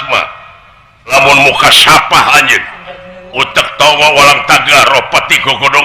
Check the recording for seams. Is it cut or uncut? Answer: cut